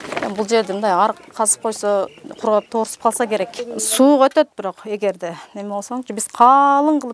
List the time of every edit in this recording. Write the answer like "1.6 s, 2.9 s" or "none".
3.6 s

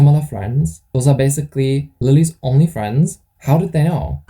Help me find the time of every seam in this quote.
1.9 s, 3.3 s

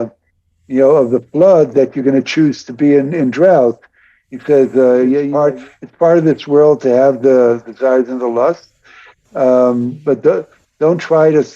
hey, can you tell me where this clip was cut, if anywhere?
5.3 s

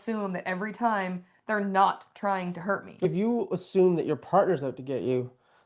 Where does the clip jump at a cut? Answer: 3.1 s

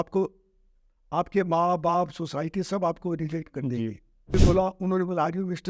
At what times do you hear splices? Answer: 4.3 s

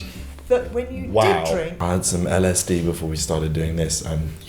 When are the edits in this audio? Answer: 1.7 s

